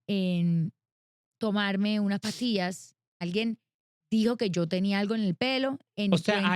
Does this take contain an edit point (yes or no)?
yes